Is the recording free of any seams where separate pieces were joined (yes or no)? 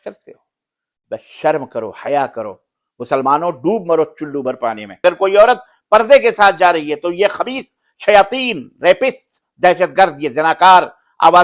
no